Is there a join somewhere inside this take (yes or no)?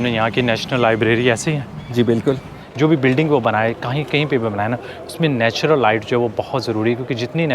yes